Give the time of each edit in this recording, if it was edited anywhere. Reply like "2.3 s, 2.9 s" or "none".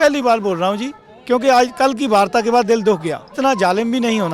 3.3 s

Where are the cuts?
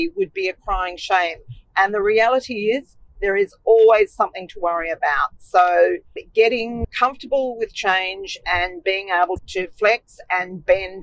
none

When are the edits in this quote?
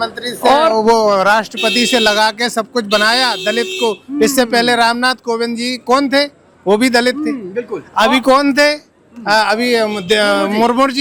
none

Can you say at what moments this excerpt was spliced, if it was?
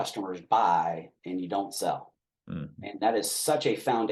none

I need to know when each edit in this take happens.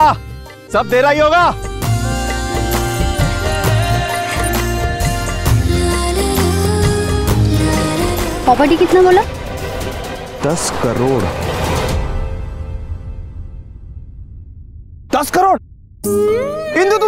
8.2 s

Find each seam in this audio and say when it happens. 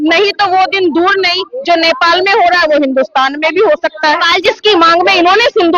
4.5 s

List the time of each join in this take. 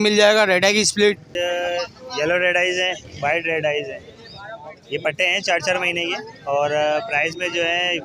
1.3 s

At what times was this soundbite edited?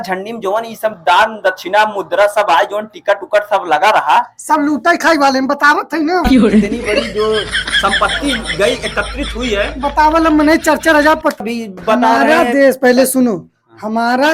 11.4 s

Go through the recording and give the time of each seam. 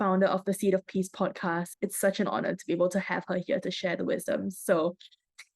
1.7 s

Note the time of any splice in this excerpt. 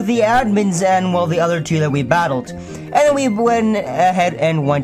3.3 s

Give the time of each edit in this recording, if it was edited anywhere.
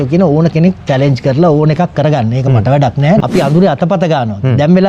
3.2 s

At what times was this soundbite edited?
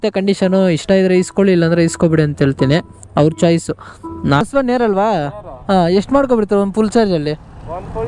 4.4 s

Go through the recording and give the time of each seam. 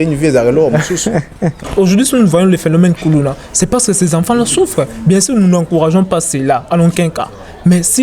1.6 s

